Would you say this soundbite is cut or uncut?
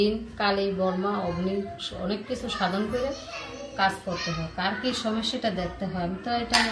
uncut